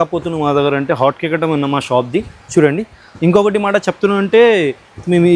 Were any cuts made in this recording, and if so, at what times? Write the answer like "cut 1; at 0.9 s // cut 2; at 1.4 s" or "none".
none